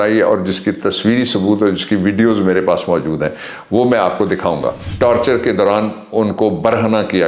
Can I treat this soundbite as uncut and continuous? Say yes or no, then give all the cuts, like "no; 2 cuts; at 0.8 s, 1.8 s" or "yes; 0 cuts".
no; 1 cut; at 4.8 s